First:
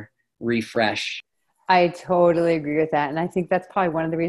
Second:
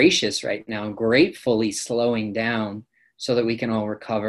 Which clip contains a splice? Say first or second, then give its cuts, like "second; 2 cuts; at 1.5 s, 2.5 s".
first; 1 cut; at 1.1 s